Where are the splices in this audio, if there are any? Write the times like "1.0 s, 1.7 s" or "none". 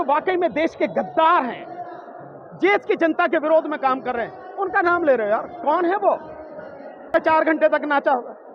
7.1 s